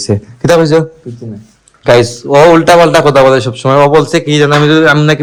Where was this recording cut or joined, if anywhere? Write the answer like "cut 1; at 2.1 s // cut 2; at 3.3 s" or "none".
none

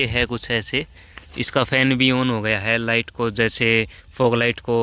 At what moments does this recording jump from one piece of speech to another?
none

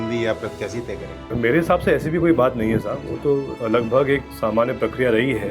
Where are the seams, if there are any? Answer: cut 1; at 1.1 s // cut 2; at 3.5 s // cut 3; at 4.3 s

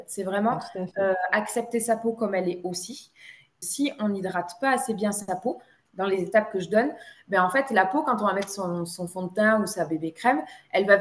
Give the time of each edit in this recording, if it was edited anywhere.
cut 1; at 3.5 s

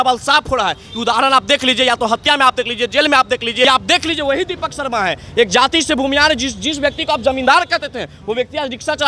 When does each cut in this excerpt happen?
cut 1; at 3.6 s

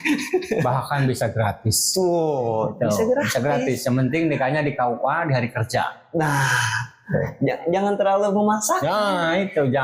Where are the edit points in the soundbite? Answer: none

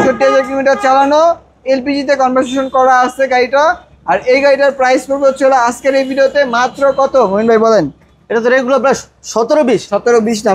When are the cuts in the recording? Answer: none

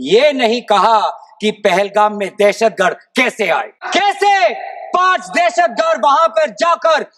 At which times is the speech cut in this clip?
cut 1; at 3.8 s

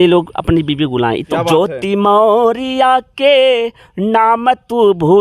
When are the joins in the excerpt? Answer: cut 1; at 1.3 s

